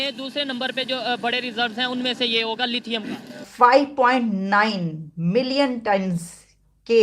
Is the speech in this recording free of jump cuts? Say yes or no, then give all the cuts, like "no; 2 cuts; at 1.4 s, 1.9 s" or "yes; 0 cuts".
no; 1 cut; at 3.4 s